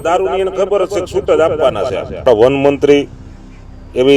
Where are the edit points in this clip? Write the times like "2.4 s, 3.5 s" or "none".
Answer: 2.5 s